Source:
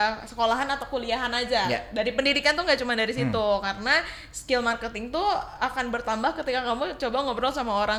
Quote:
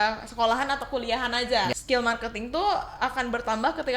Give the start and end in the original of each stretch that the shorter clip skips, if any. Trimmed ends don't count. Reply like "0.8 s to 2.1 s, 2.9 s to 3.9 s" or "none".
1.8 s to 4.4 s